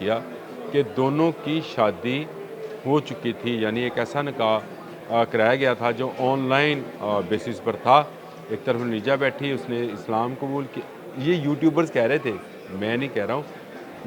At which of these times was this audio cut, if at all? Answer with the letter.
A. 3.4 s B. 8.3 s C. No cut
C